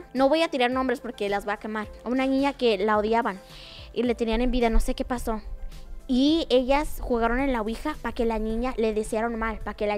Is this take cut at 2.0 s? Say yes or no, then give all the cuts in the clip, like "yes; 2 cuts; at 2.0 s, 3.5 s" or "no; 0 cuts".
no; 0 cuts